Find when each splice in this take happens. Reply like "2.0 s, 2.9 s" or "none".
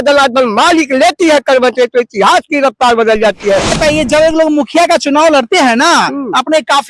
3.8 s